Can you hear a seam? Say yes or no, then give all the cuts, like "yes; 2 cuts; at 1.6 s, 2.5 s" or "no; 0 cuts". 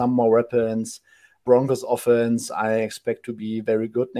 yes; 1 cut; at 1.4 s